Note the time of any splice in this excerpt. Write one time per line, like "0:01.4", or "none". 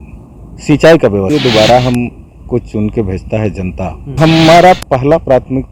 0:01.3
0:04.2